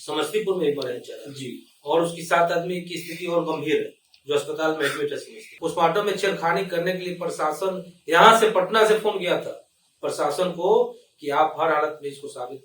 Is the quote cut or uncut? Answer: cut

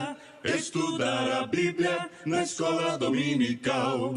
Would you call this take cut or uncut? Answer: cut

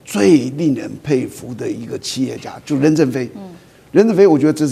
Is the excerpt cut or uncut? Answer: uncut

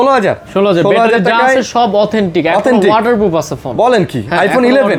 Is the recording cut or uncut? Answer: uncut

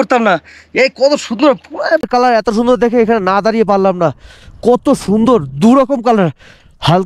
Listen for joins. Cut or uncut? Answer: cut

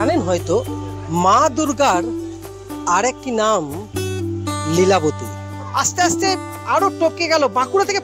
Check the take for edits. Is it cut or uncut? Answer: cut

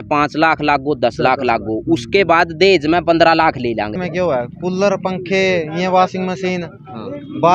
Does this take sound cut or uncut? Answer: cut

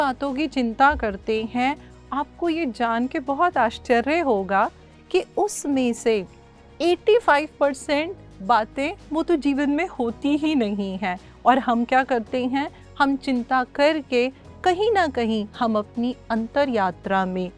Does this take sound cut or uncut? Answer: uncut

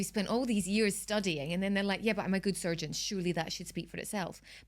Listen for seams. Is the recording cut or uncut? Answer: uncut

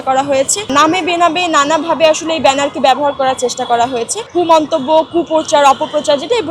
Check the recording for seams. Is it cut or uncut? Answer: cut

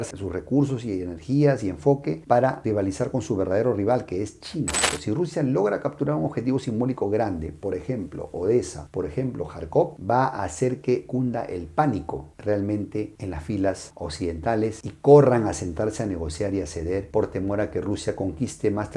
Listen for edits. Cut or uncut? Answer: cut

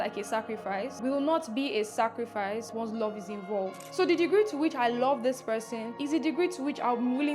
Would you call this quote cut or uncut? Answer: cut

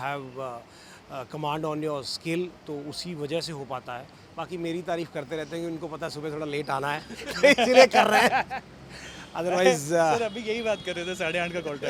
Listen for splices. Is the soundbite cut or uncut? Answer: uncut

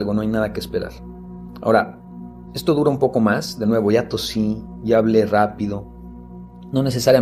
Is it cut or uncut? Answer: uncut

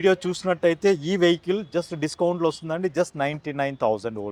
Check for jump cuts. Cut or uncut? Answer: uncut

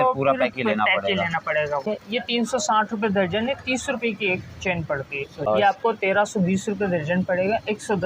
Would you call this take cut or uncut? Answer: cut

